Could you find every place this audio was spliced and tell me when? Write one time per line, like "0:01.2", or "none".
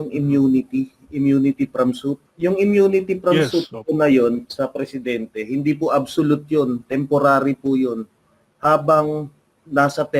0:02.3